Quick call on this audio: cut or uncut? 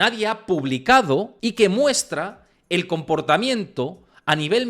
cut